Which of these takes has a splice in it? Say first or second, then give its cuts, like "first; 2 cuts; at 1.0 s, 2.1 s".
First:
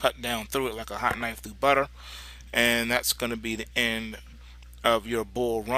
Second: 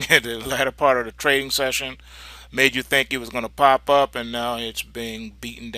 second; 1 cut; at 2.7 s